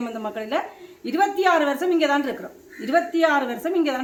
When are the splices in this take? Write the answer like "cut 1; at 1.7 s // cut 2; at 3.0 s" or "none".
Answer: none